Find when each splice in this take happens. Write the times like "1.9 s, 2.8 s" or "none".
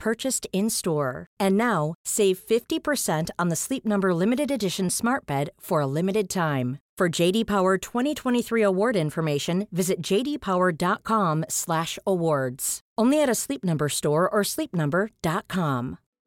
none